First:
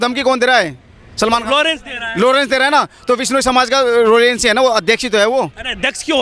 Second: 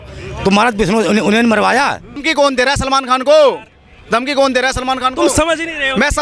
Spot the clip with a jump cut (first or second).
second